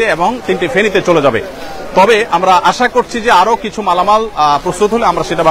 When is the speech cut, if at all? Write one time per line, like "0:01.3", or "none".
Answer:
none